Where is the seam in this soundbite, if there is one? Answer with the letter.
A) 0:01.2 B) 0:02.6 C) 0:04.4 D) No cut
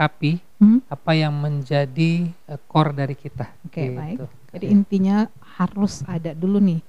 D